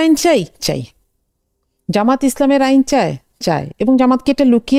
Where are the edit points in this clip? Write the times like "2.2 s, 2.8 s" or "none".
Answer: none